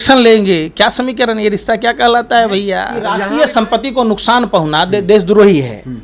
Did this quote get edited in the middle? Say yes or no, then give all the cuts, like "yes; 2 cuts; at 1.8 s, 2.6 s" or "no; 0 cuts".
yes; 1 cut; at 2.9 s